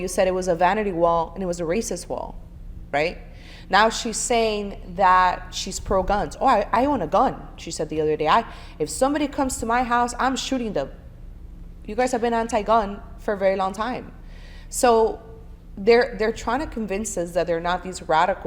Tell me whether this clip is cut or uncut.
uncut